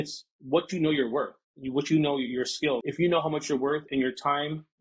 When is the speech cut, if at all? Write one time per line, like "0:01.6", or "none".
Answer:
0:02.9